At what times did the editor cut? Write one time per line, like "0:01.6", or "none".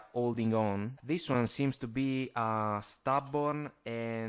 0:01.0